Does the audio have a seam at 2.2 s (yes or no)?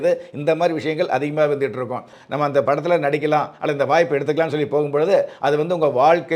yes